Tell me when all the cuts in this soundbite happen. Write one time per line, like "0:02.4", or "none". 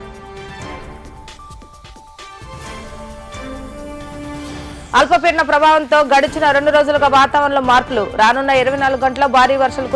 0:04.3

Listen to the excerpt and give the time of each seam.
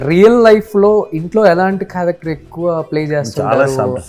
none

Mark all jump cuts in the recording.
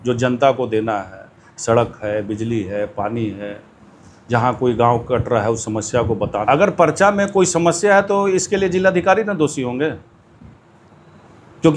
0:06.4

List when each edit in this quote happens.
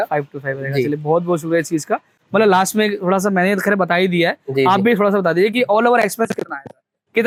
none

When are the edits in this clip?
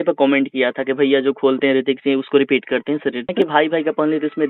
0:03.3

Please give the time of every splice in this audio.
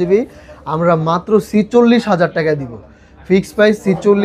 none

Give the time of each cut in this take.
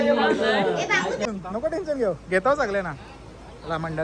0:01.2

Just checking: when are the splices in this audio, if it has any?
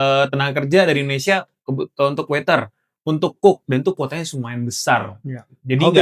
none

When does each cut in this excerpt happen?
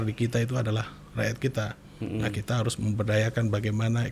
none

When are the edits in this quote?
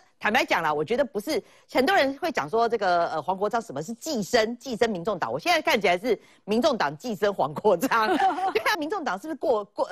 0:08.8

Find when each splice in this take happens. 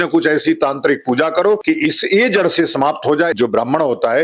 0:01.6
0:03.3

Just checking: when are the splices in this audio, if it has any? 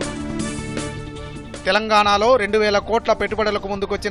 0:01.4

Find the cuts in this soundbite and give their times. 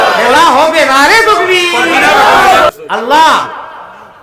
0:02.7

